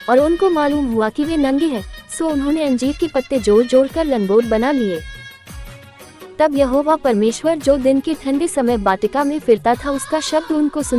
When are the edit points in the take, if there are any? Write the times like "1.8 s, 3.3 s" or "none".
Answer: none